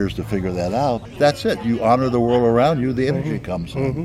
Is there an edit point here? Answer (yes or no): yes